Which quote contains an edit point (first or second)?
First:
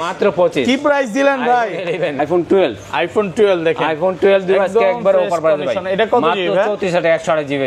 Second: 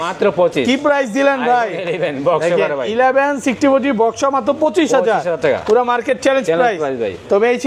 first